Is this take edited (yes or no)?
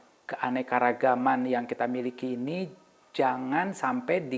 no